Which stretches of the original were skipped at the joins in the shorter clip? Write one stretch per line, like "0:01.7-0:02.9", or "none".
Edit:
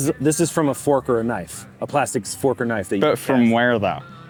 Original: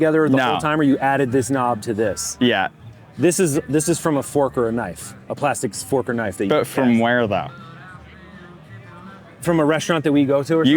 none